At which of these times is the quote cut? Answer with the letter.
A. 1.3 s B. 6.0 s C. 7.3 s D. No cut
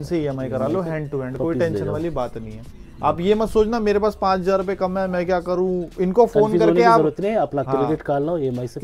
D